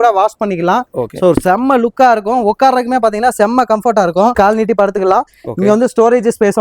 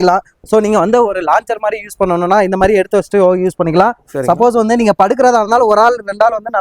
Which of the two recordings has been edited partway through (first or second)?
first